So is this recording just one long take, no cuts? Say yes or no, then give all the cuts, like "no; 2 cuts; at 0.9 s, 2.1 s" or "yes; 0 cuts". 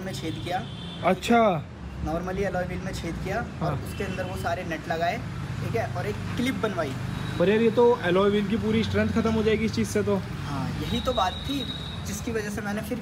yes; 0 cuts